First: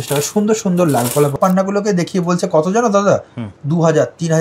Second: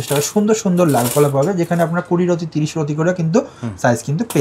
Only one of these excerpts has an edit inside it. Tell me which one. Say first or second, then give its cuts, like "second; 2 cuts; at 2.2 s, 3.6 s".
first; 1 cut; at 1.4 s